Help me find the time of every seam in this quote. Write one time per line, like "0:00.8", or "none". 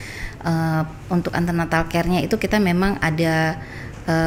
none